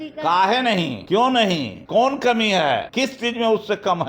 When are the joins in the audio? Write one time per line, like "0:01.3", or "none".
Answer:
0:01.0
0:01.8
0:02.9